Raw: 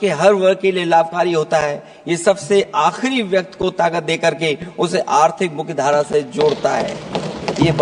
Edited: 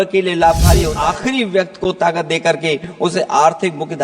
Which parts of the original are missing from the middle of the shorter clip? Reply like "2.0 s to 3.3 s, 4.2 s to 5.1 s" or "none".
1.4 s to 2.7 s